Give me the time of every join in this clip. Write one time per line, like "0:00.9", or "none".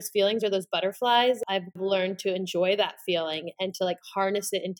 0:01.6